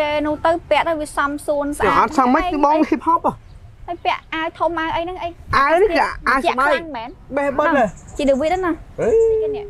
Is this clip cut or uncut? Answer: uncut